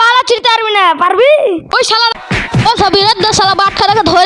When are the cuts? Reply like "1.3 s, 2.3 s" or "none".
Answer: 2.2 s